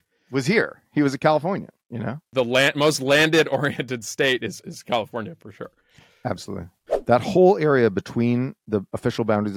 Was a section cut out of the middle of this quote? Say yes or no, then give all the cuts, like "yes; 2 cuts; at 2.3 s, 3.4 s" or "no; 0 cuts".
yes; 2 cuts; at 2.2 s, 6.8 s